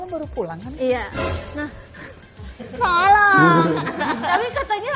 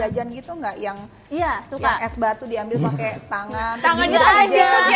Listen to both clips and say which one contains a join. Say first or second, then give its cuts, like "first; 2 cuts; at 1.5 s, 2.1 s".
first; 1 cut; at 3.9 s